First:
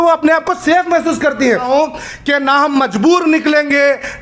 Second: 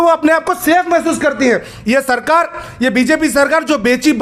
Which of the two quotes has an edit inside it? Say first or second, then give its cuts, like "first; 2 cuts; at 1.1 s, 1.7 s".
first; 1 cut; at 1.7 s